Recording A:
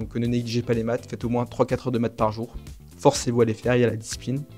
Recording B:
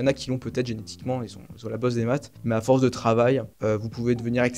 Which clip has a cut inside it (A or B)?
B